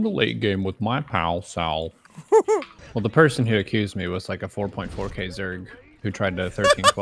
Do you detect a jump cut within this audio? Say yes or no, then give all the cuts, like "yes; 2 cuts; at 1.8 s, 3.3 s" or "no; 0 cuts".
yes; 1 cut; at 2.8 s